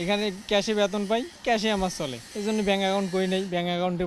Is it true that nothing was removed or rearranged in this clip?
no; 2 cuts; at 1.3 s, 2.2 s

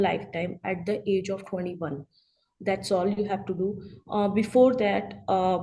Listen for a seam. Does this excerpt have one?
no; 0 cuts

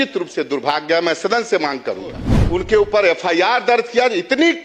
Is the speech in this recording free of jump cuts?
no; 1 cut; at 2.3 s

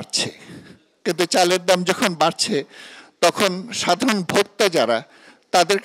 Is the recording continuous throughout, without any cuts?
yes; 0 cuts

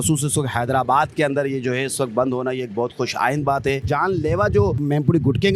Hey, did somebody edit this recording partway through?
yes; 2 cuts; at 3.8 s, 4.8 s

